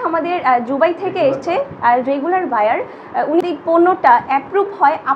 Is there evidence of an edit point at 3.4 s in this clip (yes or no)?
yes